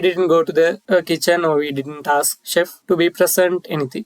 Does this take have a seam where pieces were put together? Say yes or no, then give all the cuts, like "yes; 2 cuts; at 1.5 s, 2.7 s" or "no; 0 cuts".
yes; 2 cuts; at 0.8 s, 2.8 s